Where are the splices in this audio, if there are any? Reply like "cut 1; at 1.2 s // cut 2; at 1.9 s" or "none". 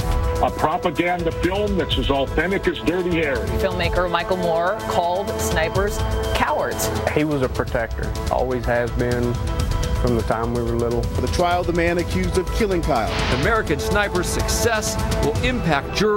cut 1; at 10.0 s